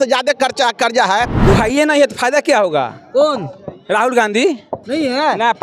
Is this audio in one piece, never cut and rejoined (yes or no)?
no